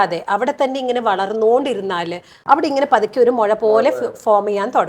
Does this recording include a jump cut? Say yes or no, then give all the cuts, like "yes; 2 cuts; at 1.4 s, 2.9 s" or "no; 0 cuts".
yes; 1 cut; at 2.4 s